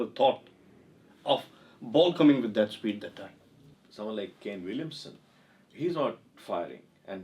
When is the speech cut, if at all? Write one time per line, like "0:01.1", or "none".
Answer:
0:03.7